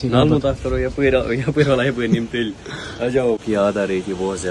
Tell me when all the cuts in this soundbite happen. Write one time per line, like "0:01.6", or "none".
0:03.4